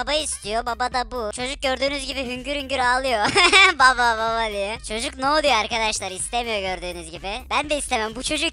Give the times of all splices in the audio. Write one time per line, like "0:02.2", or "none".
0:01.3
0:04.8